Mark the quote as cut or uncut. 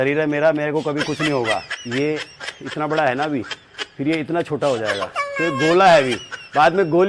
cut